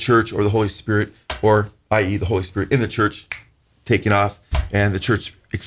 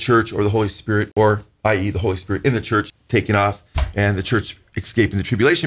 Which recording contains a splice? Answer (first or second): second